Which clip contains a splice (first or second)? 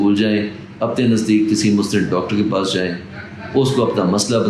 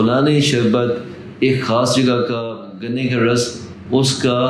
second